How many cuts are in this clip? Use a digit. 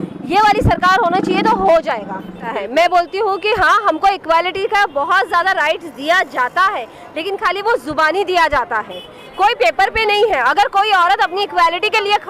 1